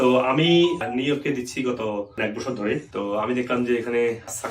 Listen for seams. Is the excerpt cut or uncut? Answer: cut